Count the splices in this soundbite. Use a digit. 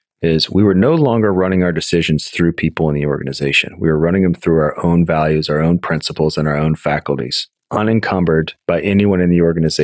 1